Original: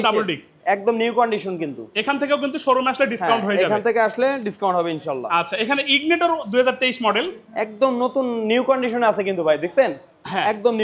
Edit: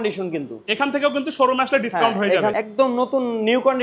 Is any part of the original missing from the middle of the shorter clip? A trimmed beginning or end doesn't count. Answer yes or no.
yes